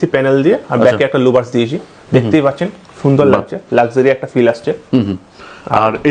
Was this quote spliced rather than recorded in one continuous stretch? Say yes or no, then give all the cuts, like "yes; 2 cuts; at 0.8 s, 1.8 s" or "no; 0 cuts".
no; 0 cuts